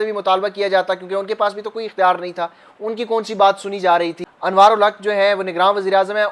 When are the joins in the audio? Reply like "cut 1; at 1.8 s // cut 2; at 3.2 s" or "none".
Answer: cut 1; at 4.3 s